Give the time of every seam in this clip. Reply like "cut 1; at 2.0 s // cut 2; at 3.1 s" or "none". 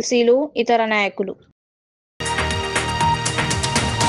cut 1; at 2.0 s